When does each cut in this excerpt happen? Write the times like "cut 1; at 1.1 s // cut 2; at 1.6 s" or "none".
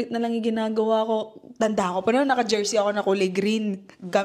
none